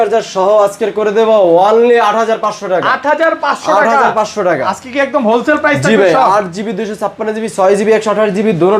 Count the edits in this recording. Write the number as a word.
zero